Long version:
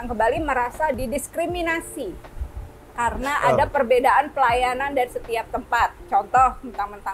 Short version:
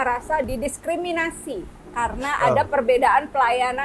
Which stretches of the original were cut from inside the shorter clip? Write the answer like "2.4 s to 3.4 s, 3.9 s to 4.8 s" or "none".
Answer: 2.3 s to 2.8 s

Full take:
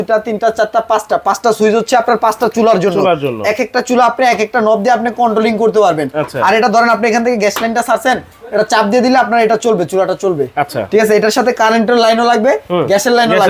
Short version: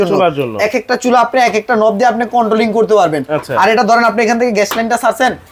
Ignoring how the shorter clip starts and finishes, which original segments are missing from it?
none

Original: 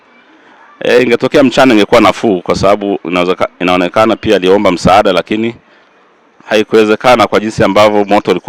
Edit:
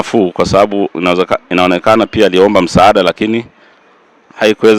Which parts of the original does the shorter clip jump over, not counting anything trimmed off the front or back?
none

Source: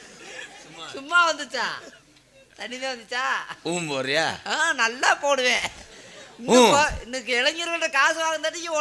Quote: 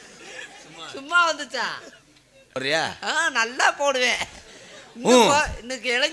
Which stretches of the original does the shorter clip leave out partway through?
2.6 s to 4.0 s

